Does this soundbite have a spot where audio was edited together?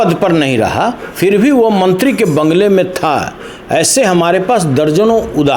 no; 0 cuts

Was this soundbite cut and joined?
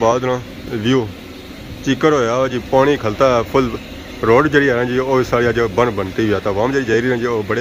no; 0 cuts

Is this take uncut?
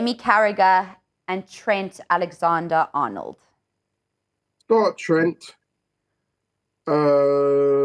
yes; 0 cuts

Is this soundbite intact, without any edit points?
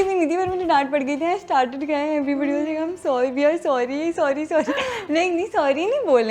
yes; 0 cuts

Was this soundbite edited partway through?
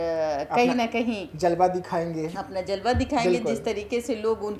no; 0 cuts

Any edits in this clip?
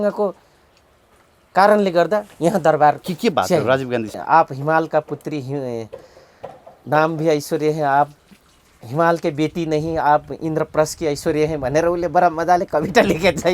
yes; 1 cut; at 4.1 s

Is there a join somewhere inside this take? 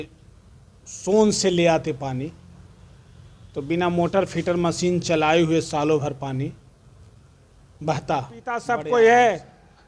yes; 1 cut; at 8.7 s

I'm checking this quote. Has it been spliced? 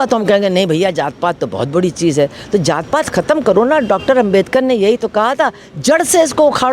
no; 0 cuts

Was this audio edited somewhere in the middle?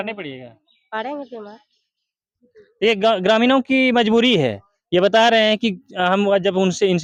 no; 0 cuts

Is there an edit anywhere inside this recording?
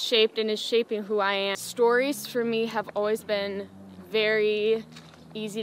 yes; 1 cut; at 1.6 s

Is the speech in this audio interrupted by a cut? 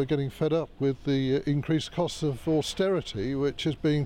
yes; 1 cut; at 1.6 s

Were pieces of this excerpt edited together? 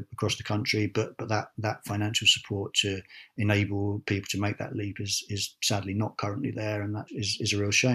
yes; 1 cut; at 7.1 s

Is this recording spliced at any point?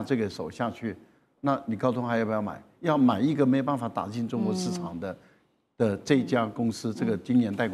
no; 0 cuts

